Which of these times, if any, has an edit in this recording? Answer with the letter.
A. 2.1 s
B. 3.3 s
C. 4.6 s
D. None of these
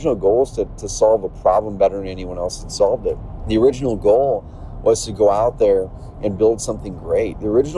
B